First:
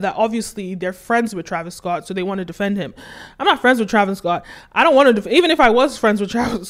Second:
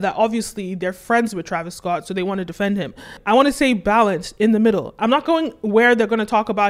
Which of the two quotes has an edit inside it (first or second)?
second